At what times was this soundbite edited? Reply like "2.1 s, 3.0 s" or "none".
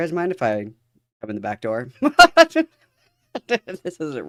none